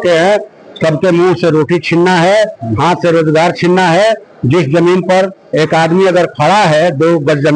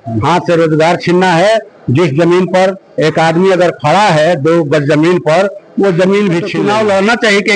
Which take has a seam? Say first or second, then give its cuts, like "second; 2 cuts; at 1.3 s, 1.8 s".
second; 1 cut; at 6.5 s